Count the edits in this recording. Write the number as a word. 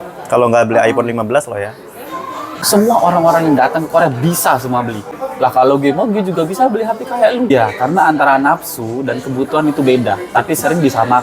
three